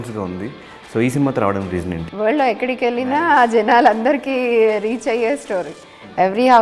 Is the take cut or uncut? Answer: cut